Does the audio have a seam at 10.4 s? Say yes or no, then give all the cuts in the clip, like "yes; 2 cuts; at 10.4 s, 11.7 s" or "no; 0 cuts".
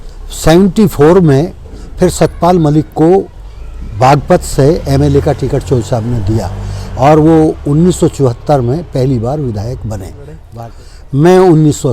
yes; 1 cut; at 10.4 s